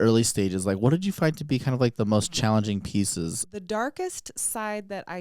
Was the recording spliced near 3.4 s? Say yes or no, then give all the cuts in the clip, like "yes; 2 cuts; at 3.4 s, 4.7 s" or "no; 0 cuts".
yes; 1 cut; at 3.4 s